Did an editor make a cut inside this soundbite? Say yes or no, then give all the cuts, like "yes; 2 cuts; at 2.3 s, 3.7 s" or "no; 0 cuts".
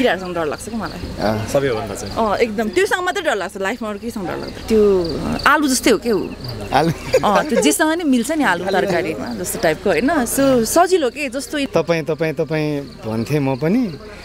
yes; 2 cuts; at 4.5 s, 11.6 s